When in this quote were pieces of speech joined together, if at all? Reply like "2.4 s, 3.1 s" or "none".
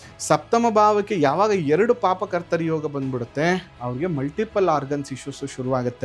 none